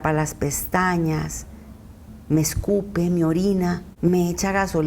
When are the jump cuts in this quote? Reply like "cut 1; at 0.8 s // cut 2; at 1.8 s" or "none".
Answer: cut 1; at 3.9 s